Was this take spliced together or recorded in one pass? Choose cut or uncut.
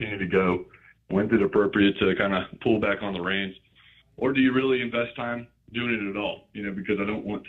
uncut